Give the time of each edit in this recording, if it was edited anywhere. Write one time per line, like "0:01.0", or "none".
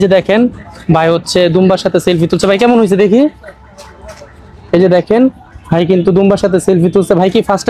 none